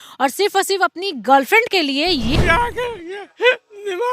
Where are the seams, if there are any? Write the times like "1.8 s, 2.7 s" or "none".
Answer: 2.3 s